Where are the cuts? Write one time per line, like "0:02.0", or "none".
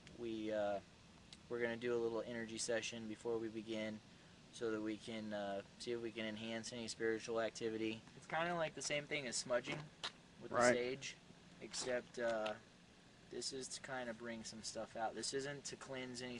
none